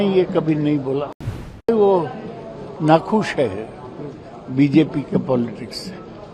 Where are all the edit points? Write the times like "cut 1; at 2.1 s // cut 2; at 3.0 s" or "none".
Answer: cut 1; at 1.7 s